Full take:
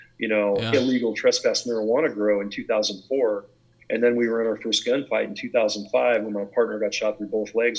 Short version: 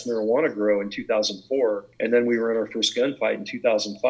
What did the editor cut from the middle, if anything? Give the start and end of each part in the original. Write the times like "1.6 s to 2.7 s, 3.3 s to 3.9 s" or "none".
3.5 s to 3.8 s